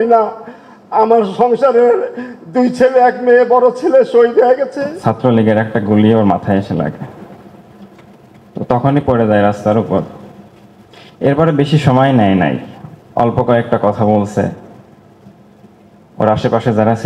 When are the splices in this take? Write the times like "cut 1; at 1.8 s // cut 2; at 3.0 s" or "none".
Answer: cut 1; at 4.9 s